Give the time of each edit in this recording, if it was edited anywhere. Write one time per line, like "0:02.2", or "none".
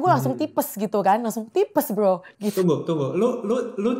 0:02.6